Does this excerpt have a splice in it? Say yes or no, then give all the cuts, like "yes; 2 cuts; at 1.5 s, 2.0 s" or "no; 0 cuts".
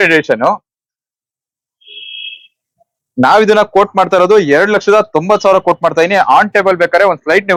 no; 0 cuts